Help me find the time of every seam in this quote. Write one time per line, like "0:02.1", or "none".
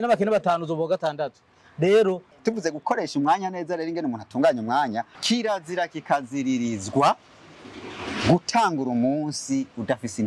0:02.3
0:05.1